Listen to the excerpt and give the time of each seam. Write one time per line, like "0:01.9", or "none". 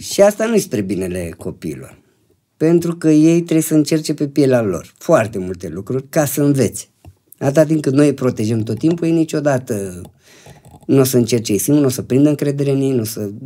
none